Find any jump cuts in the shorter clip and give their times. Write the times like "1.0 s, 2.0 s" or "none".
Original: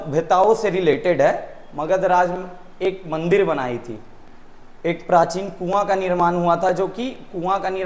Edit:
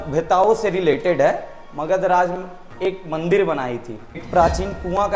4.2 s